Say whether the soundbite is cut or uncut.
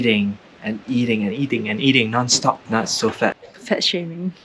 cut